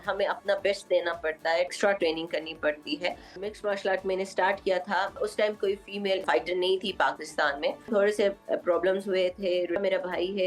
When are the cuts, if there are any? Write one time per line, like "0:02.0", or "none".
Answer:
0:01.7
0:03.4
0:05.2
0:06.2
0:07.9
0:09.8

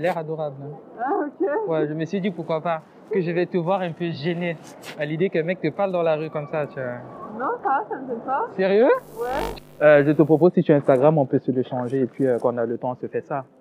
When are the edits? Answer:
0:09.5

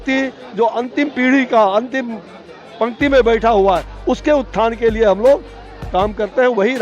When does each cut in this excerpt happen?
none

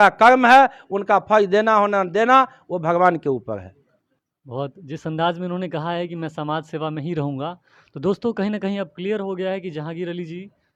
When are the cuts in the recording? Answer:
none

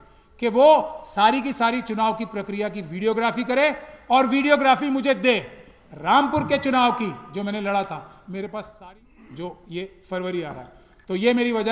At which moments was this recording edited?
0:08.7

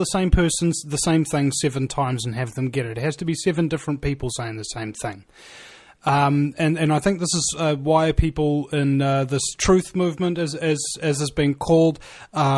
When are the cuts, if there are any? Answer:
0:01.6

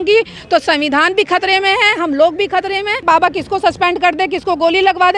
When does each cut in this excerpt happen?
0:03.0

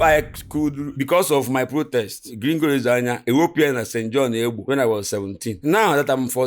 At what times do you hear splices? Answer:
0:00.9
0:02.2

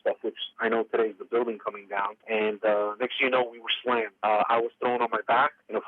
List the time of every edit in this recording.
none

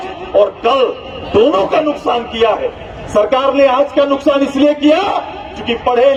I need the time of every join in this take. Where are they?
none

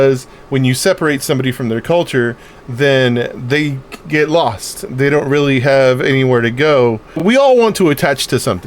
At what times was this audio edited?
0:07.2

